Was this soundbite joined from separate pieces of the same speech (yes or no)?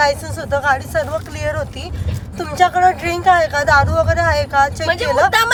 no